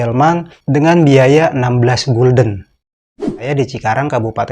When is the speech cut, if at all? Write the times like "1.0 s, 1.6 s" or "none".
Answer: 3.3 s